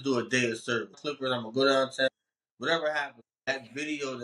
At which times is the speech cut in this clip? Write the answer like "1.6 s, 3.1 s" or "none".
1.0 s, 2.1 s, 3.4 s